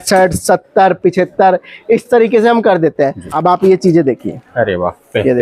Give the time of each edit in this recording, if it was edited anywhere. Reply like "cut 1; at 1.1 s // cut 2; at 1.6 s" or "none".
cut 1; at 3.2 s